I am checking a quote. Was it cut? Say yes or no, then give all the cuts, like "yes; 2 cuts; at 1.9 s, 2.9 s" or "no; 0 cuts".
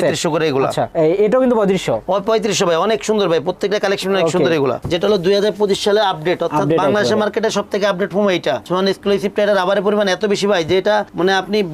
yes; 2 cuts; at 4.8 s, 8.6 s